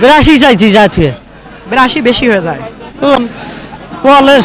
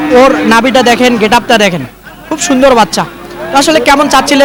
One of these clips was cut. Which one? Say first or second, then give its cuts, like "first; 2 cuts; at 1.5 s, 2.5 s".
first; 1 cut; at 3.1 s